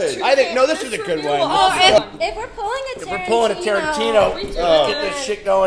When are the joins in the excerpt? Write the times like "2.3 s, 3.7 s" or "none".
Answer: 2.0 s

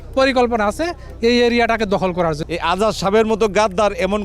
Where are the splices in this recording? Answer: 2.4 s

